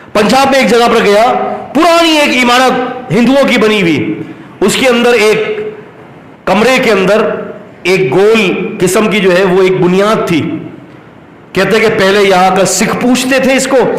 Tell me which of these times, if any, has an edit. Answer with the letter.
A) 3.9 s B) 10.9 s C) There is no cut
C